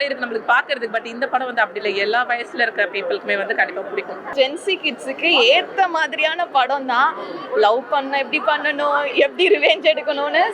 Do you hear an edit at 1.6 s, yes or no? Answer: no